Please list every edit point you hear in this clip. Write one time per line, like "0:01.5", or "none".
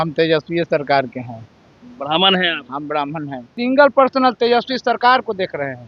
0:03.5

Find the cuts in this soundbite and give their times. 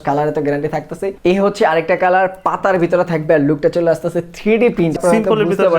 0:01.0
0:05.0

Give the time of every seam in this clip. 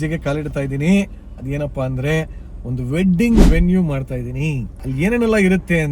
0:04.8

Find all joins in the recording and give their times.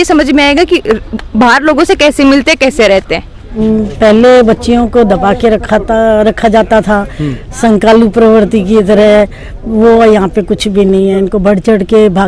0:03.5

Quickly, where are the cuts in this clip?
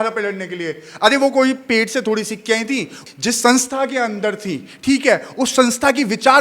0:03.0

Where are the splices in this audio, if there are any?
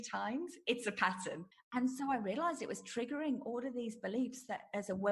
0:01.4

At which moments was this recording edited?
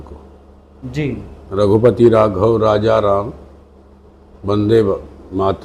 none

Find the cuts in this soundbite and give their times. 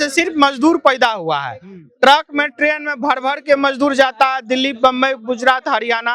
none

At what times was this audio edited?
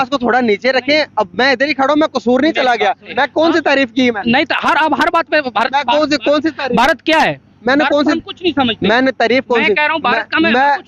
0:03.1

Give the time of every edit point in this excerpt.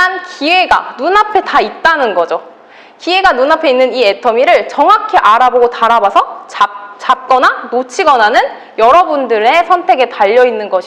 none

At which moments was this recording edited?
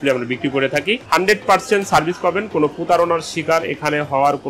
0:01.0

